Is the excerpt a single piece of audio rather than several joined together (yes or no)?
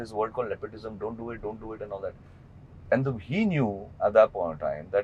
yes